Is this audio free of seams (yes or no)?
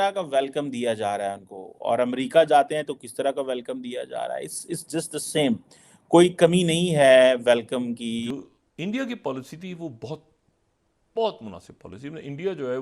no